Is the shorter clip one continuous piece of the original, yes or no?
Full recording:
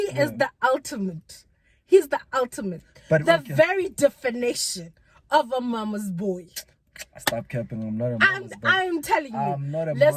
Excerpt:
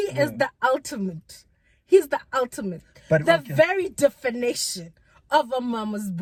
yes